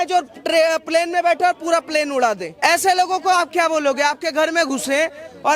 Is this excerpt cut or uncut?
cut